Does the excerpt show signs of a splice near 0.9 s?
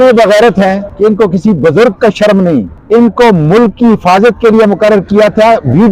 yes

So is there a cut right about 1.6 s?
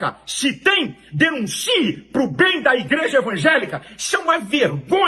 yes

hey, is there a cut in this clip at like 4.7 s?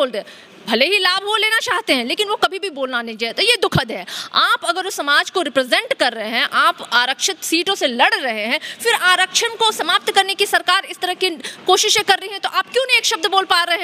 no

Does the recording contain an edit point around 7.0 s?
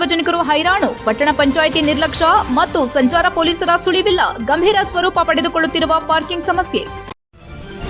yes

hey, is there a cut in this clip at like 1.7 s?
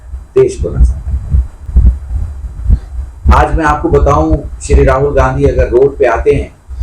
no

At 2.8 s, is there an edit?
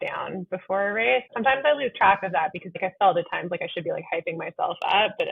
yes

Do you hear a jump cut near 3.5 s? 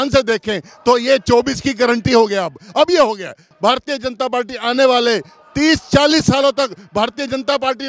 yes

